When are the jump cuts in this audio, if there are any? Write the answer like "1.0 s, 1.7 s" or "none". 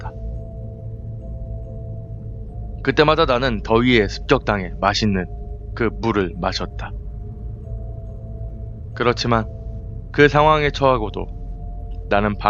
none

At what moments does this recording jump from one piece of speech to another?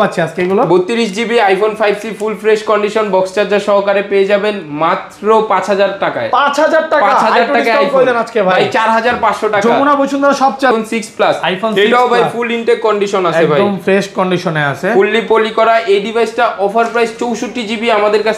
10.7 s

